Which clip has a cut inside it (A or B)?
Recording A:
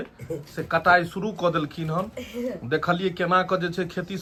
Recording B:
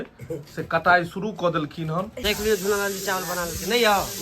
B